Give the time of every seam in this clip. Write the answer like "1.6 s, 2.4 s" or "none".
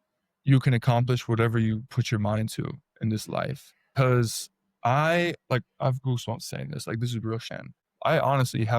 3.9 s, 7.5 s